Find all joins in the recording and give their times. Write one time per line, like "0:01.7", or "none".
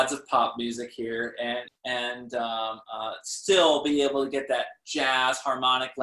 0:01.7

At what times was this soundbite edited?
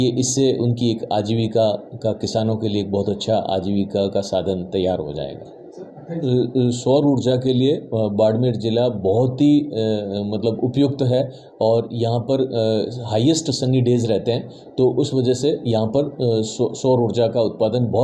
0:06.2

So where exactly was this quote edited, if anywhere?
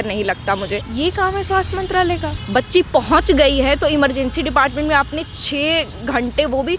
0:00.9
0:02.3

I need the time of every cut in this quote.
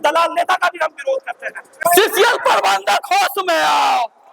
0:01.8

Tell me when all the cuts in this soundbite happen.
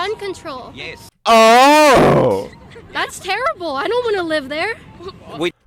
none

